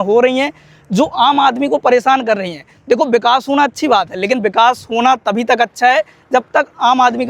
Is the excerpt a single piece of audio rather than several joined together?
yes; 0 cuts

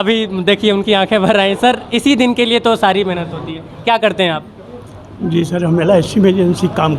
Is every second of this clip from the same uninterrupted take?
yes; 0 cuts

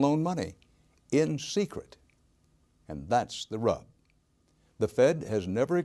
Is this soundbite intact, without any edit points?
yes; 0 cuts

